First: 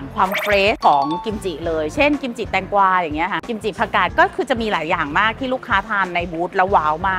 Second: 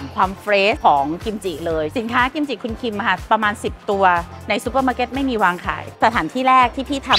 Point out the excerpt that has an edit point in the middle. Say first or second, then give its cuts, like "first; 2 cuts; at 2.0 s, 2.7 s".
second; 2 cuts; at 1.9 s, 5.9 s